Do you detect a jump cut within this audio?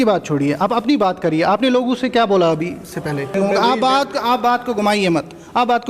yes; 1 cut; at 3.3 s

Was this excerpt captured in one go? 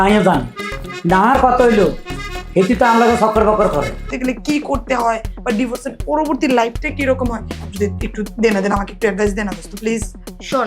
no; 1 cut; at 4.1 s

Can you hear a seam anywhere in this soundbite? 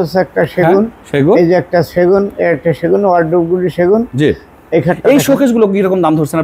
no; 0 cuts

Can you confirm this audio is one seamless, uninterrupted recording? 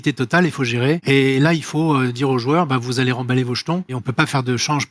no; 2 cuts; at 1.0 s, 4.0 s

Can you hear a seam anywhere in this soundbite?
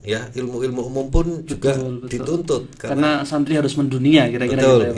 no; 0 cuts

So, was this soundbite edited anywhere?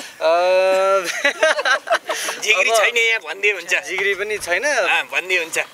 no; 0 cuts

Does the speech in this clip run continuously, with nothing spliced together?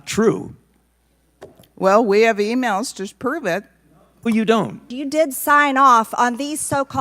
no; 1 cut; at 4.9 s

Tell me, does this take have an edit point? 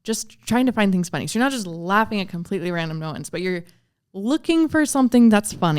no; 0 cuts

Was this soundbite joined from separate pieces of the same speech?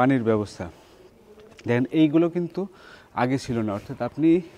no; 0 cuts

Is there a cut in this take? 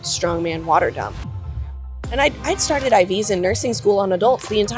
yes; 1 cut; at 1.6 s

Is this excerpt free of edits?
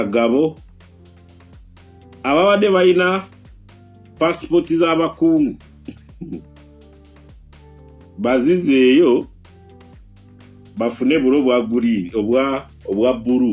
no; 2 cuts; at 9.4 s, 10.7 s

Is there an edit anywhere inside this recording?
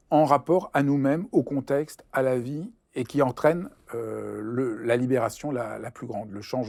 no; 0 cuts

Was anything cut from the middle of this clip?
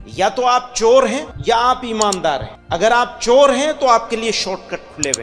yes; 2 cuts; at 1.3 s, 2.5 s

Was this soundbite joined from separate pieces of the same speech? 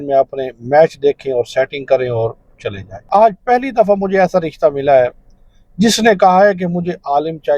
yes; 1 cut; at 3.0 s

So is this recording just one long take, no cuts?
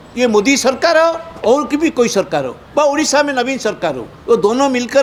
yes; 0 cuts

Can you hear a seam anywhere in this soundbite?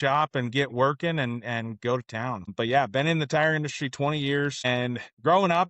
yes; 2 cuts; at 2.5 s, 4.7 s

